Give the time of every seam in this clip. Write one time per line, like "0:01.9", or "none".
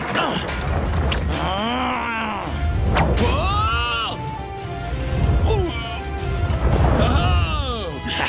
0:06.1